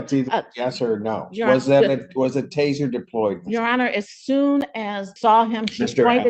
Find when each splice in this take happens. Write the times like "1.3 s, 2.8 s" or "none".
5.1 s